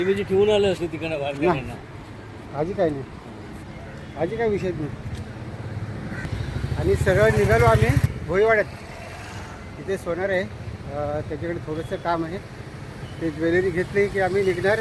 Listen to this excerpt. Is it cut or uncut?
cut